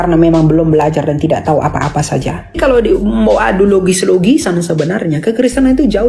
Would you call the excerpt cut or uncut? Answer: cut